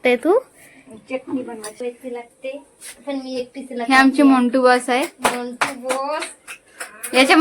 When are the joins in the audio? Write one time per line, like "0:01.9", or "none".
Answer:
0:01.8